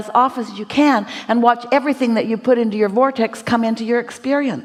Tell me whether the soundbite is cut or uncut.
uncut